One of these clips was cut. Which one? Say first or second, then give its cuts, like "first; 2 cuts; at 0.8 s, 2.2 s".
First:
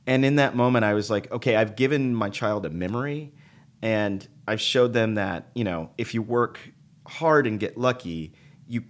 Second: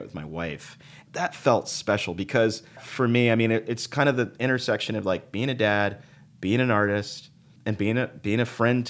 second; 3 cuts; at 1.0 s, 2.9 s, 7.5 s